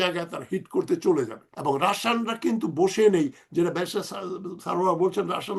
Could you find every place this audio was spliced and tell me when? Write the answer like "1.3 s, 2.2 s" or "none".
1.4 s